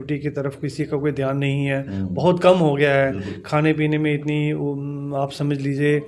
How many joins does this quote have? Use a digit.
0